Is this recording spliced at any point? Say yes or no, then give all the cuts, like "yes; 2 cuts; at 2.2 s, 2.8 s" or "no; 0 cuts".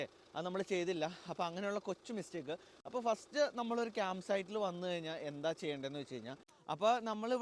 yes; 1 cut; at 6.5 s